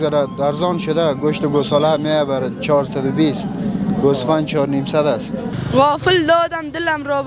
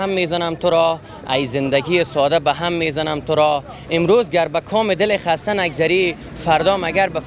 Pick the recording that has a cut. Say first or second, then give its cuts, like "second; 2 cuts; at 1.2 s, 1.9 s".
first; 1 cut; at 5.5 s